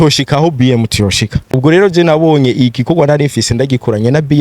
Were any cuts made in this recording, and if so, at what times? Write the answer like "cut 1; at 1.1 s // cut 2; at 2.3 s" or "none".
cut 1; at 1.4 s